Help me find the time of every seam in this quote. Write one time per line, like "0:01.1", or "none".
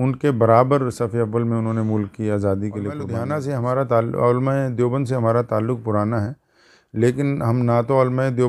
0:03.2